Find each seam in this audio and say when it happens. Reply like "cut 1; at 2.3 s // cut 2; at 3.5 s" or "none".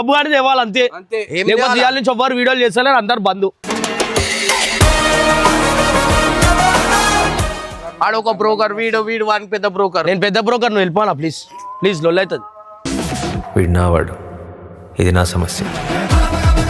cut 1; at 7.8 s